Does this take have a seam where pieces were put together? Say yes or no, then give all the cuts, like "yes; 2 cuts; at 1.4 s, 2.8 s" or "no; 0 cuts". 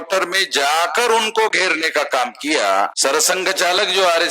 yes; 1 cut; at 2.9 s